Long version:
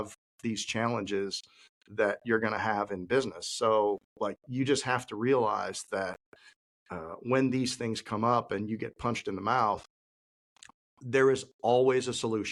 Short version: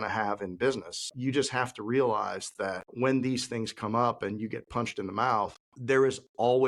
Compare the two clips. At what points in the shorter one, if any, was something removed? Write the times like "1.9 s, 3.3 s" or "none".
1.0 s, 2.9 s, 5.7 s